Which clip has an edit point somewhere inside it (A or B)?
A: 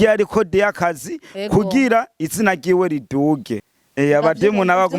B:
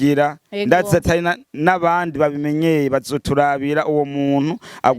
A